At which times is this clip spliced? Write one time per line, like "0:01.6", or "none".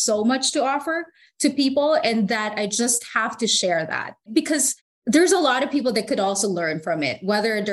none